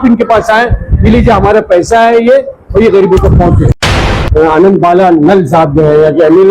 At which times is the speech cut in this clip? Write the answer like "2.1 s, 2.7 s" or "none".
4.0 s